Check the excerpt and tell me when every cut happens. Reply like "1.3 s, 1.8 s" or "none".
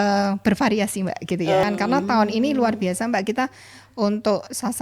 1.6 s